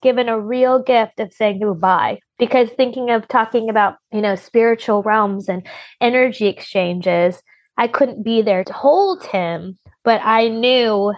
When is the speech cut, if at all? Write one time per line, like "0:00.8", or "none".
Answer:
0:02.2
0:08.7

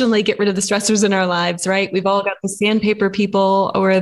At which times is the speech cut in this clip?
none

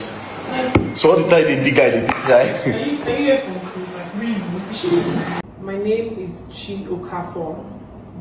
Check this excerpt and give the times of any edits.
0:05.4

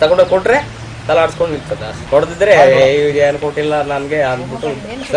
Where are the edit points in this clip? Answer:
0:02.0

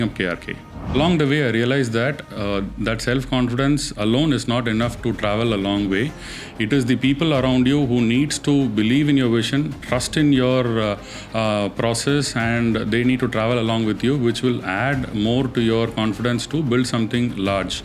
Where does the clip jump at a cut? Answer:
0:00.9

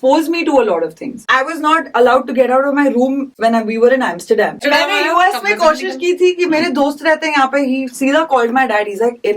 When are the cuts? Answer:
0:01.2
0:03.3
0:04.6

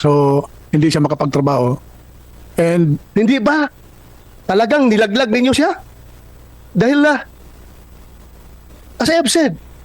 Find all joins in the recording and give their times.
0:03.0

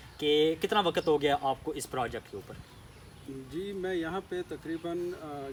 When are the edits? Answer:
none

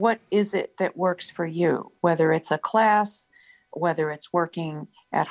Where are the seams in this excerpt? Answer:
0:03.7

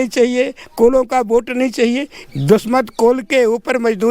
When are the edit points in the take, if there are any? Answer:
0:02.1

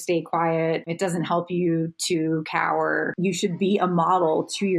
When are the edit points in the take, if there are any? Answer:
0:00.9
0:03.2

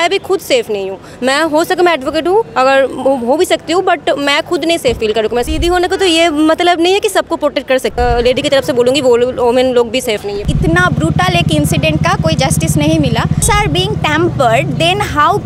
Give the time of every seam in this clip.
0:05.5
0:07.9
0:10.5
0:13.4

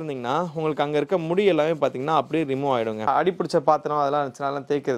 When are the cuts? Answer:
0:03.1

